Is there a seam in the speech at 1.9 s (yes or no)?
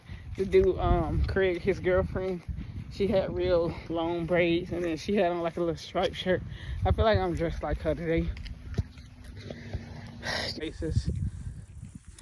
no